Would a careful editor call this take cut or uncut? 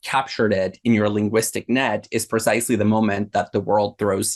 uncut